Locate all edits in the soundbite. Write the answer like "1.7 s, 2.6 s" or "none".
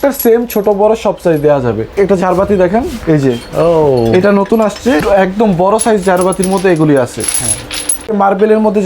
1.9 s, 5.0 s, 8.2 s